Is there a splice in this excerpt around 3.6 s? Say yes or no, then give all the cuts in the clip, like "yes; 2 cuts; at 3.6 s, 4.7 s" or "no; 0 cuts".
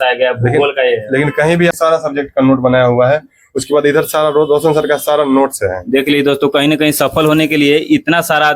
no; 1 cut; at 1.8 s